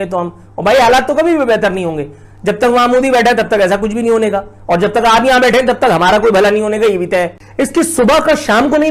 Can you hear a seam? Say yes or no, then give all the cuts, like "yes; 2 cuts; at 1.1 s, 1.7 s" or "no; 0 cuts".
yes; 1 cut; at 7.4 s